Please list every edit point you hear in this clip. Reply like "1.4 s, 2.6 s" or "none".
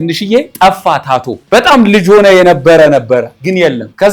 1.4 s